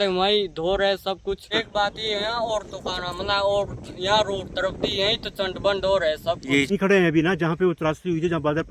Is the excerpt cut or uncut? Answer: cut